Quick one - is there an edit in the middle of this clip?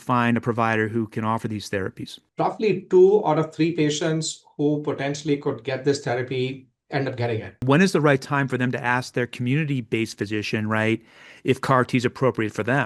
yes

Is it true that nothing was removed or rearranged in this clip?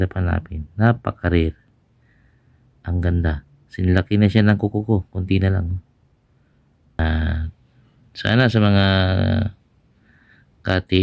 no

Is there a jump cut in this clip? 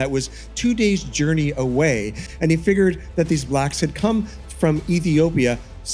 no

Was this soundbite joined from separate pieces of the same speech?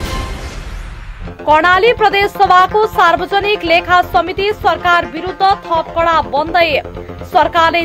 no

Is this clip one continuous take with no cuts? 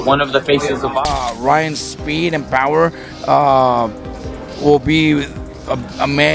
no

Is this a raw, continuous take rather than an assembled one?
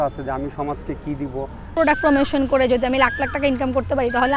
no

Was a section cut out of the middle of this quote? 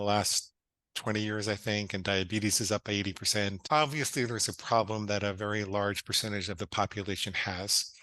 yes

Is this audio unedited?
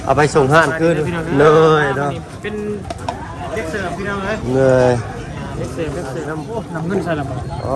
no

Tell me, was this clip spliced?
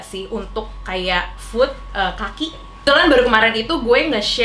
yes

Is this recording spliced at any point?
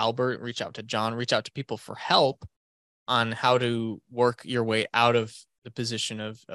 no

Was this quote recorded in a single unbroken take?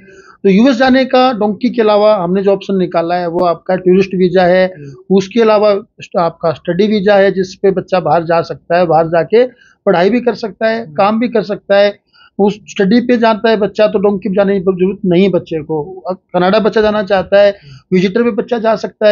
yes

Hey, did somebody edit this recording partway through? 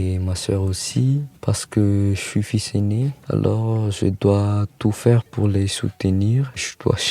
yes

